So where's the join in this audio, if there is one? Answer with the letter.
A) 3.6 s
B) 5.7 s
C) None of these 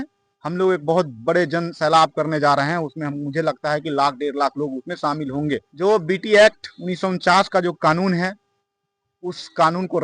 B